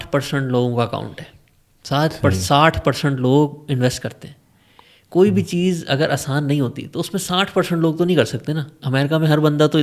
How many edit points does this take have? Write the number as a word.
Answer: zero